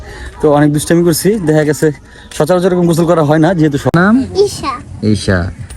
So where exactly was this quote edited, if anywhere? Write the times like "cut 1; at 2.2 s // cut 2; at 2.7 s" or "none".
cut 1; at 3.9 s